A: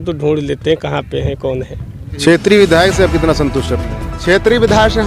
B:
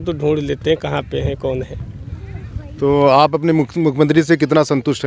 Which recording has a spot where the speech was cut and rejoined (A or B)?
A